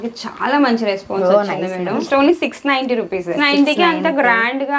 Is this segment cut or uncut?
cut